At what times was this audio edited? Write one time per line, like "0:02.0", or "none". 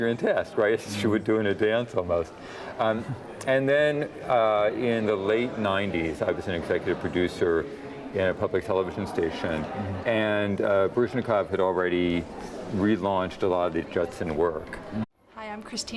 none